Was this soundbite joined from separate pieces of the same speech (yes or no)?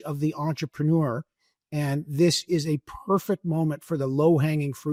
no